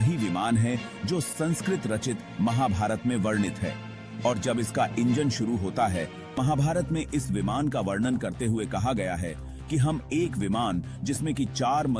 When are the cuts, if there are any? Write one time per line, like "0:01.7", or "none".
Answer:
0:06.2